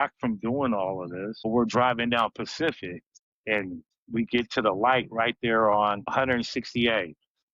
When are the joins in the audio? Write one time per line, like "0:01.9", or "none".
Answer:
0:01.5
0:03.3